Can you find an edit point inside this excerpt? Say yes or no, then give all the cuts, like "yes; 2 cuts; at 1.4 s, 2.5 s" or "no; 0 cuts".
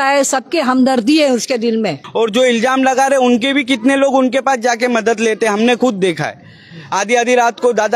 yes; 1 cut; at 2.0 s